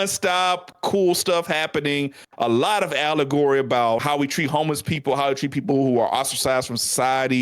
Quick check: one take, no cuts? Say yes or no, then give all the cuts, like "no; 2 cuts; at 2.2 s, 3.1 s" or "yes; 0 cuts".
no; 1 cut; at 4.0 s